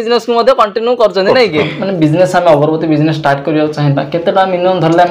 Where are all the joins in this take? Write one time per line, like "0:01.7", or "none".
0:01.7